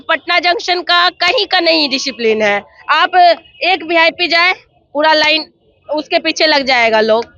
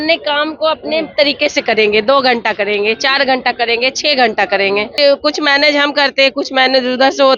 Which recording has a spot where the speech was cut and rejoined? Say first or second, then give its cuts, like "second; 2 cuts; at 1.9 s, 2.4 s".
second; 1 cut; at 4.9 s